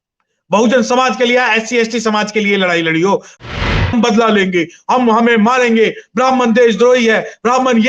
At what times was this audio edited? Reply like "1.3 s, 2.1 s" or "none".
3.5 s